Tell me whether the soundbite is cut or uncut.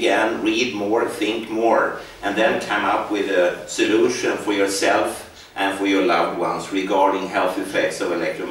uncut